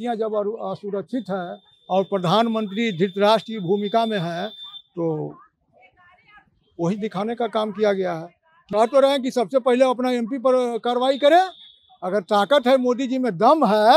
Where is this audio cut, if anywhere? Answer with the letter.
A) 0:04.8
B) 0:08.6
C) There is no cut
B